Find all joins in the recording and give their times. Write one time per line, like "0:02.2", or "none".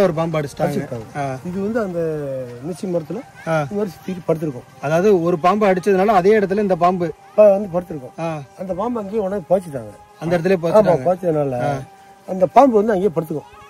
none